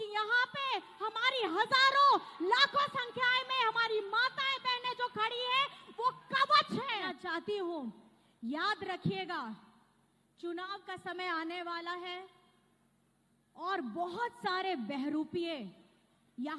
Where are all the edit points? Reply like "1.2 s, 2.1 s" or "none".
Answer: 7.1 s